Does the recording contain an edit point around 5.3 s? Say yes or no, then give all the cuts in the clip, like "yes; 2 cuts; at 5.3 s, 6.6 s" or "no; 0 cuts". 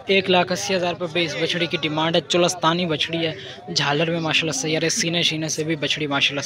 no; 0 cuts